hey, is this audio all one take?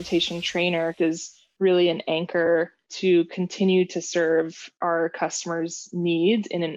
no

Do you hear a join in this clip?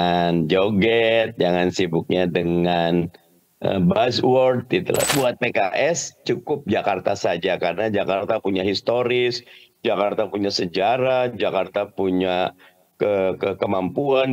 yes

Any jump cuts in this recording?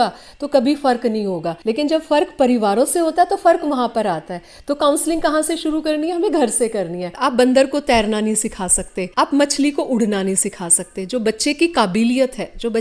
yes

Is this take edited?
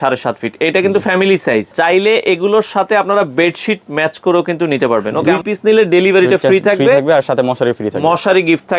yes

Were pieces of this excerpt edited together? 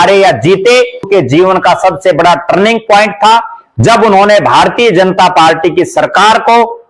yes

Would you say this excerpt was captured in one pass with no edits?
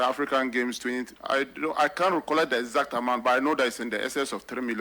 no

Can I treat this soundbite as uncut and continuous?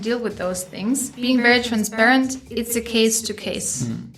no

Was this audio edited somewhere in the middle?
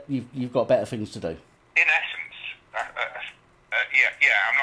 no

